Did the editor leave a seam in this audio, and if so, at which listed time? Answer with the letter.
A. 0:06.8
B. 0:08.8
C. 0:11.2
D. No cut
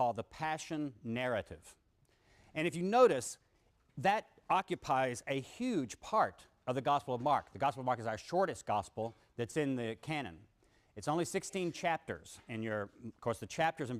A